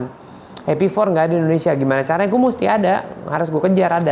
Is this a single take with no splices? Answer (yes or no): yes